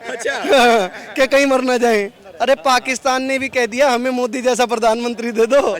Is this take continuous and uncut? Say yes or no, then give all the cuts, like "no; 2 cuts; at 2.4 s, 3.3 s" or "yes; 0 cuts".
no; 1 cut; at 2.2 s